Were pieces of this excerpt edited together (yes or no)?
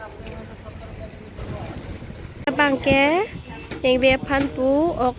yes